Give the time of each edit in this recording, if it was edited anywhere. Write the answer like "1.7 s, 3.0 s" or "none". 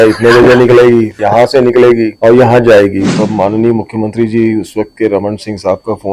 1.1 s, 2.1 s, 3.1 s